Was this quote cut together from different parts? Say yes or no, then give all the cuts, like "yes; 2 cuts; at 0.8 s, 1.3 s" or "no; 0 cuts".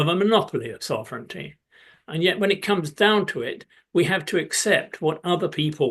no; 0 cuts